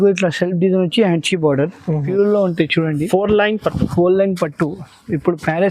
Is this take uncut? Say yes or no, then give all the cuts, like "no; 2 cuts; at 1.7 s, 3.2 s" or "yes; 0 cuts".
no; 1 cut; at 2.0 s